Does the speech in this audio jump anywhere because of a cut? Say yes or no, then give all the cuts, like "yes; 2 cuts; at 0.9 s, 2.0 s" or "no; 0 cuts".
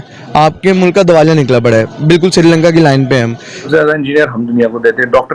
yes; 1 cut; at 3.6 s